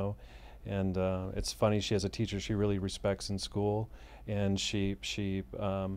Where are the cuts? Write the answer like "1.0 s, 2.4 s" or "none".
none